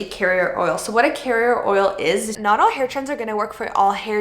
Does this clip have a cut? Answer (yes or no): yes